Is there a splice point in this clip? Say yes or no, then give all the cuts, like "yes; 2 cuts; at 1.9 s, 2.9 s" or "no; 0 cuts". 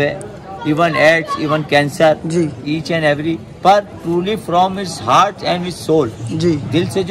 no; 0 cuts